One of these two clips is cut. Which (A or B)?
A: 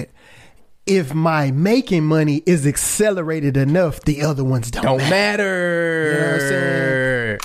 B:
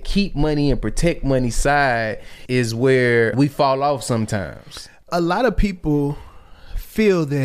B